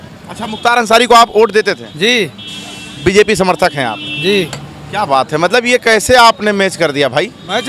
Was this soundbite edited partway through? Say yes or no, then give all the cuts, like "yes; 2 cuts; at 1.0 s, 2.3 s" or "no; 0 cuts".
no; 0 cuts